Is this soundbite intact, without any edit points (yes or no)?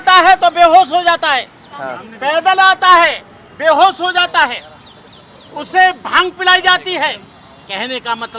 yes